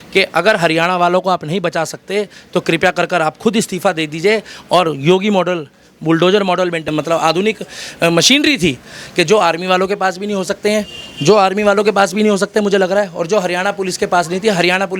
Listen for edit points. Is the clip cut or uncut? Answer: cut